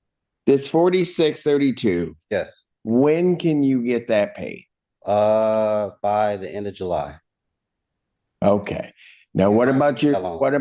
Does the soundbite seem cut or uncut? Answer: uncut